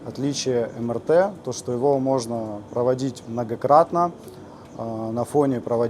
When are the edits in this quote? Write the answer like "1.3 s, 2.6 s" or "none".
none